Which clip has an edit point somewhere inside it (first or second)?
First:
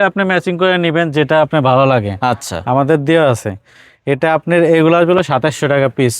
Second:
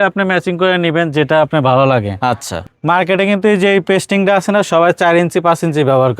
second